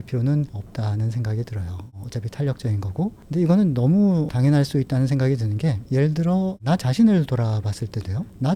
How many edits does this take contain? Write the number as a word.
zero